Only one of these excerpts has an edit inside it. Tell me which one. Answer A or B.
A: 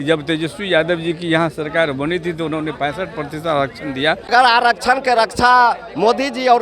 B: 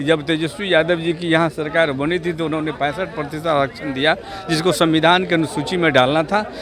A